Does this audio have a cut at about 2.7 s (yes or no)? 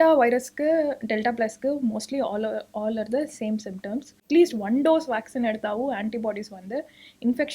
no